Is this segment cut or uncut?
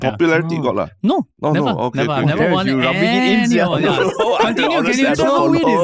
uncut